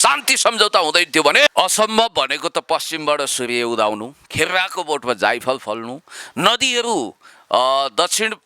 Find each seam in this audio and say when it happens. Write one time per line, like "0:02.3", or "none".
0:01.5